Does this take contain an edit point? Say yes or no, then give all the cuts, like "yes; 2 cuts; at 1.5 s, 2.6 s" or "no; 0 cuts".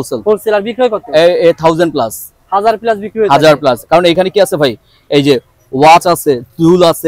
no; 0 cuts